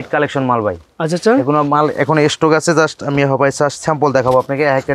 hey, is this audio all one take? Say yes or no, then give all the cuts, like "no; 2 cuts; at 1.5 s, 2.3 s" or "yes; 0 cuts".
yes; 0 cuts